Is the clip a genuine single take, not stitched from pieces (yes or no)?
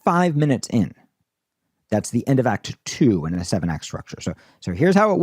no